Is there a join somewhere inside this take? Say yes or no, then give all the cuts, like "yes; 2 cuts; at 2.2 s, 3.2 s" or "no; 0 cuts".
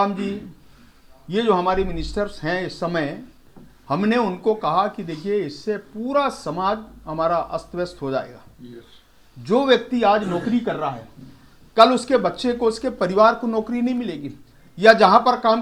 no; 0 cuts